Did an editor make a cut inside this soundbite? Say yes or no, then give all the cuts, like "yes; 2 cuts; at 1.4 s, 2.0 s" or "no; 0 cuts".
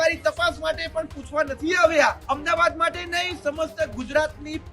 yes; 1 cut; at 2.2 s